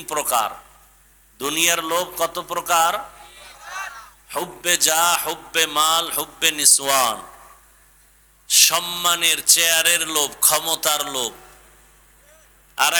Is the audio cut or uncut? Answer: uncut